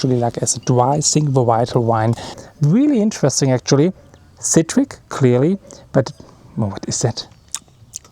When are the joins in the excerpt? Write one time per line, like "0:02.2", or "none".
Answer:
0:02.3
0:07.3